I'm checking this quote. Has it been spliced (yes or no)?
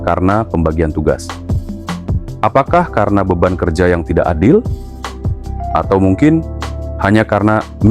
no